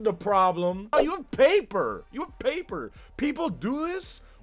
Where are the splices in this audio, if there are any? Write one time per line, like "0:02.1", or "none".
0:00.9